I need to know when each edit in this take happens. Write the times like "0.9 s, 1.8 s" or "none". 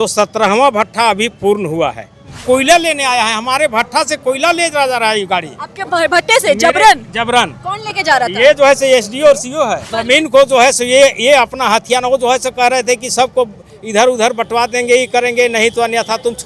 2.4 s, 9.9 s

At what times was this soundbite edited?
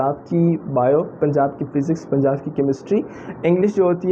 none

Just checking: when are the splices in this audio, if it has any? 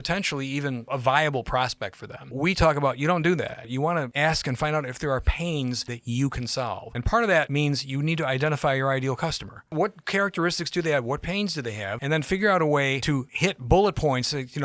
0.8 s, 2.3 s, 3.8 s, 5.9 s, 6.9 s, 7.5 s, 9.7 s, 11.9 s, 13.2 s

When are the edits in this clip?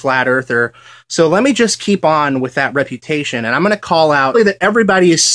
none

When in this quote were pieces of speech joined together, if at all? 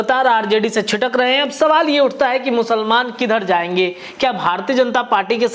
none

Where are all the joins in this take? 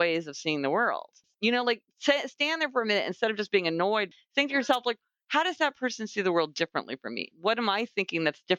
1.2 s, 4.1 s, 7.3 s

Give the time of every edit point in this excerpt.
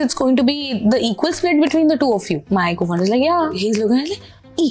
2.4 s, 3.6 s

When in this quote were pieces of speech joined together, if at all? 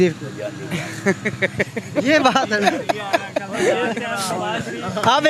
none

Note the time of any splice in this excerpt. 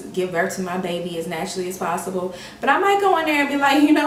none

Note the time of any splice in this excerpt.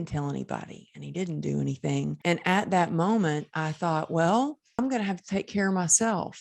2.2 s, 4.8 s

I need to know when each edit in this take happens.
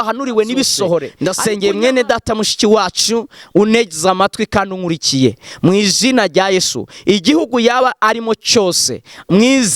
1.1 s

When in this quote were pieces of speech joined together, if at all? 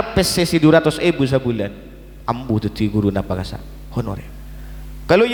none

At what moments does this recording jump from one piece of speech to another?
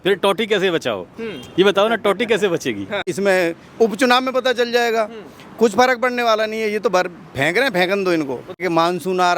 3.1 s, 8.6 s

